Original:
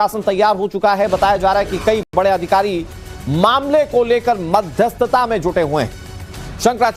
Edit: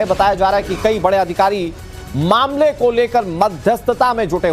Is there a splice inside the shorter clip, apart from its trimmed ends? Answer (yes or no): yes